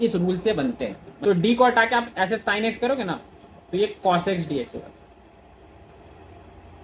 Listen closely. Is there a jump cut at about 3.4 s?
no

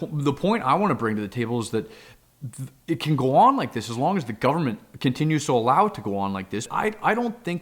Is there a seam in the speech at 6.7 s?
yes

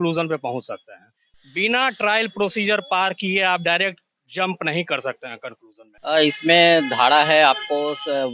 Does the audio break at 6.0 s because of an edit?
yes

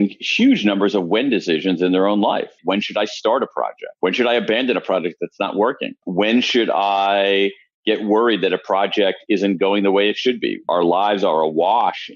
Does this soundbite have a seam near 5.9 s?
yes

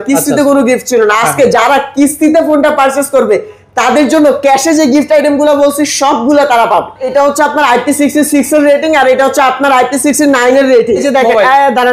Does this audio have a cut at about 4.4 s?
no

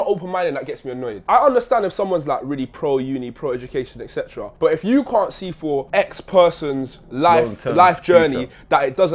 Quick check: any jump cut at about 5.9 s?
yes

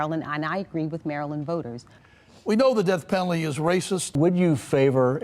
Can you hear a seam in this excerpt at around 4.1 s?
yes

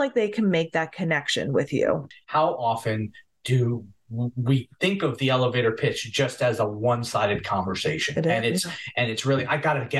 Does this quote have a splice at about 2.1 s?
yes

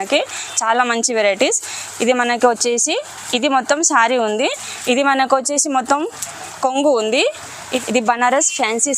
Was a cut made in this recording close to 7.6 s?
yes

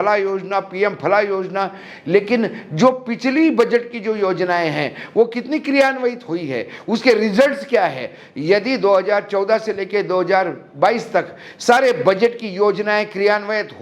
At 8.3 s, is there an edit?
no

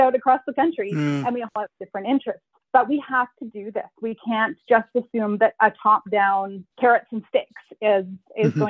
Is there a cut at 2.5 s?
yes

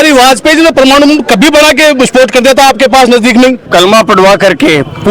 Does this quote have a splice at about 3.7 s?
yes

